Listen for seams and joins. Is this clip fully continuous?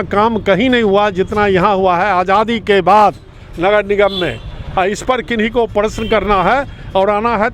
yes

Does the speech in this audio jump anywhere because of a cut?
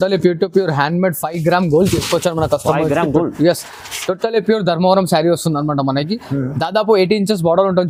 no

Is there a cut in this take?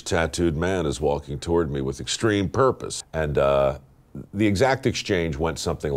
yes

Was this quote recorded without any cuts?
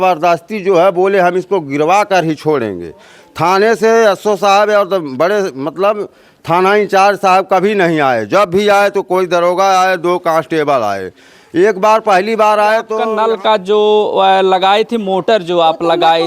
no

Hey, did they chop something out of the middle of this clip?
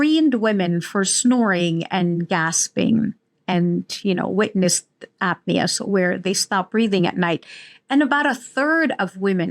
no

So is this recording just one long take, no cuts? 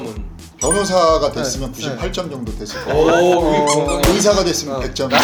yes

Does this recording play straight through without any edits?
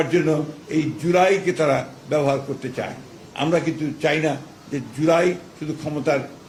yes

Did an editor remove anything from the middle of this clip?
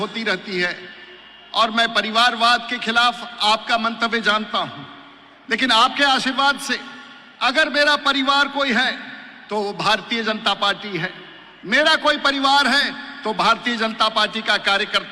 no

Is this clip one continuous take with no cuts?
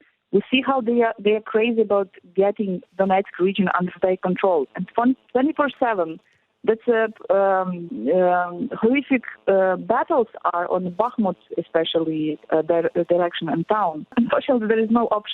no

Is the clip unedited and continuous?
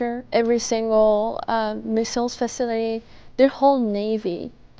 yes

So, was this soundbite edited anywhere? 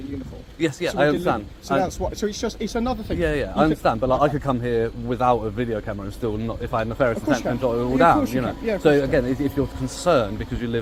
no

